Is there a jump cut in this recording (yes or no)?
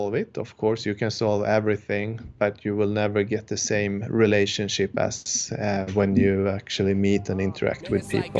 no